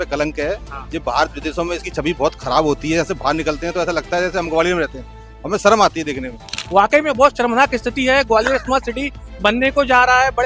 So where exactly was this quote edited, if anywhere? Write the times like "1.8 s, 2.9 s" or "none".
6.6 s